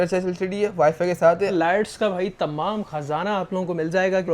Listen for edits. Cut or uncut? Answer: cut